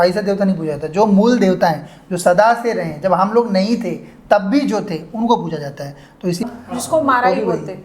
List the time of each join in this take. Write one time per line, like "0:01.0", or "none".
0:06.4